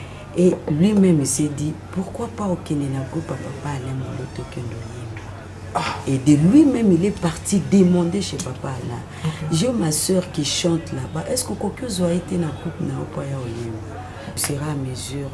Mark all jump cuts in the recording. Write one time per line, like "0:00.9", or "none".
0:14.3